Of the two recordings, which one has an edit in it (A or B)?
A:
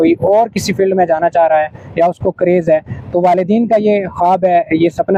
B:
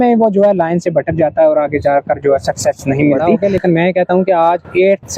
B